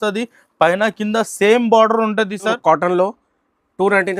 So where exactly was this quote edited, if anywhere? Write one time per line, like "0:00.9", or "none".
0:02.6